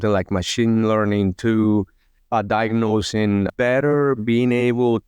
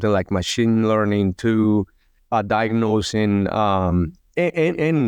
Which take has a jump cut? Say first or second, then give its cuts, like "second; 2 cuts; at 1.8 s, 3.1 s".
first; 1 cut; at 3.5 s